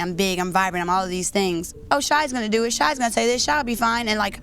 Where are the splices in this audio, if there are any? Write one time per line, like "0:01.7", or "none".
0:01.9

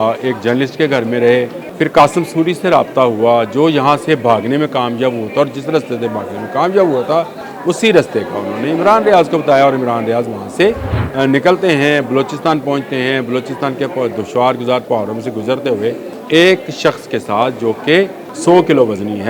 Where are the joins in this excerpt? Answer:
0:01.6
0:07.4
0:10.9
0:16.1
0:18.3

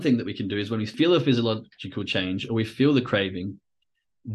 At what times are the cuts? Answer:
0:00.9

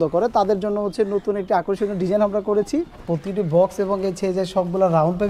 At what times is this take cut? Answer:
0:03.0

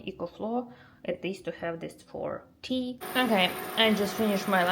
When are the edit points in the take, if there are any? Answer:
0:03.0

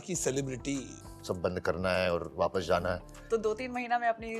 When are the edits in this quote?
0:01.0
0:03.1

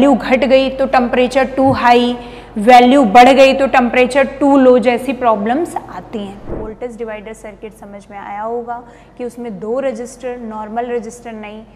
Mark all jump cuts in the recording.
0:06.6

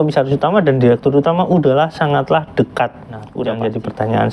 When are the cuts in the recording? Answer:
0:03.3

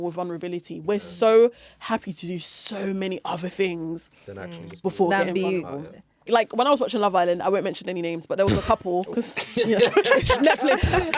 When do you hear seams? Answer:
0:06.3

